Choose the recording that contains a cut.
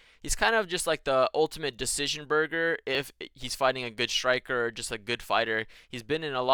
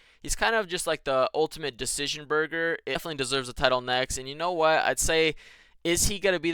second; 1 cut; at 3.0 s

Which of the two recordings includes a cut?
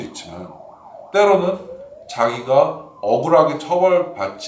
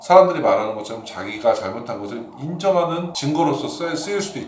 second; 1 cut; at 3.1 s

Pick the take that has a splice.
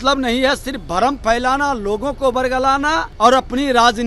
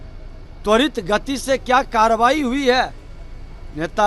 first; 1 cut; at 3.1 s

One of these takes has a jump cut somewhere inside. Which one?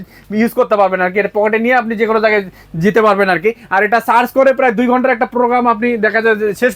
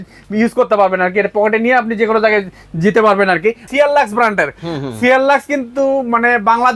second; 1 cut; at 3.6 s

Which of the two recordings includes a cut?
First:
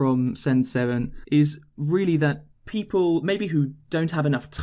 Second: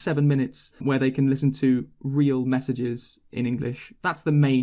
first; 1 cut; at 1.1 s

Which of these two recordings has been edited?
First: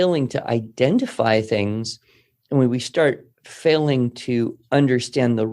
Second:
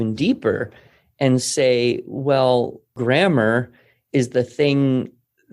second; 1 cut; at 2.9 s

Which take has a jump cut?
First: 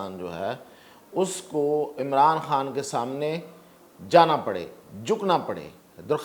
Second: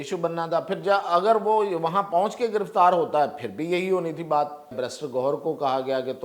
second; 1 cut; at 4.8 s

